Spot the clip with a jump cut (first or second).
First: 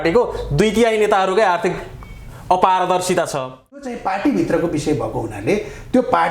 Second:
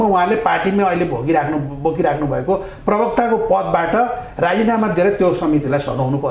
first